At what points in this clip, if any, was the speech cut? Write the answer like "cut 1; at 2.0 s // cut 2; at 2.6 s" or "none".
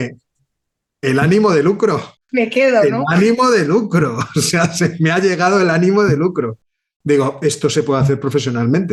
none